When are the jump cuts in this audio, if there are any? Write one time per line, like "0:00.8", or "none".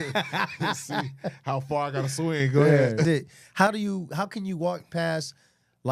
0:03.0